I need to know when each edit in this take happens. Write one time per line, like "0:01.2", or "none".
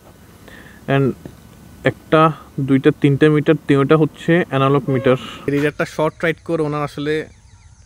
0:05.5